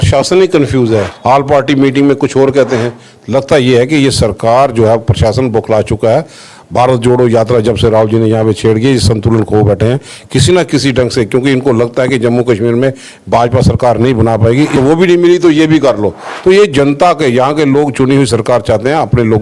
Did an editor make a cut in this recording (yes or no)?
yes